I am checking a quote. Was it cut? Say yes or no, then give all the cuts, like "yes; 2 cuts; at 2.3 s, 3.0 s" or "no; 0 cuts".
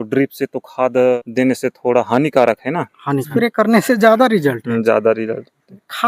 yes; 2 cuts; at 1.2 s, 3.2 s